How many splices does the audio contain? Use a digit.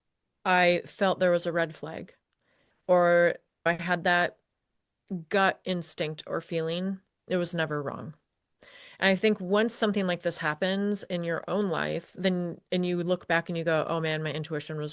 0